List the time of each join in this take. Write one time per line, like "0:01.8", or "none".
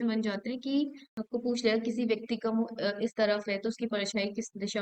0:01.1